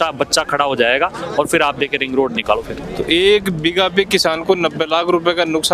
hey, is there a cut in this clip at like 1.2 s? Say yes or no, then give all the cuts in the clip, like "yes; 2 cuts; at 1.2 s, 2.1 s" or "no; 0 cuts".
no; 1 cut; at 2.8 s